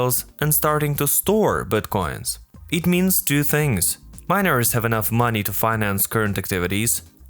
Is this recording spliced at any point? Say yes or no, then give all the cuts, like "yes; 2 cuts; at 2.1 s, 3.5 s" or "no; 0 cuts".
no; 0 cuts